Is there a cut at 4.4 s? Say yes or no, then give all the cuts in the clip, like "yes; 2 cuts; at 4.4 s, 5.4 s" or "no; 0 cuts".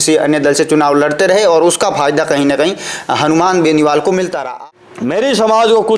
yes; 1 cut; at 4.4 s